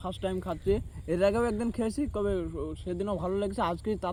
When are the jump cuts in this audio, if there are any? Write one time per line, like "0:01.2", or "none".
none